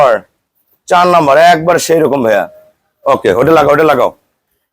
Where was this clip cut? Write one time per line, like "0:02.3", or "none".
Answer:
none